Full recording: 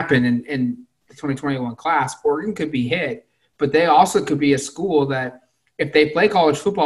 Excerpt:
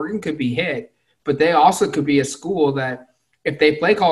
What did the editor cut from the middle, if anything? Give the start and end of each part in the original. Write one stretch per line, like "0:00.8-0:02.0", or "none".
none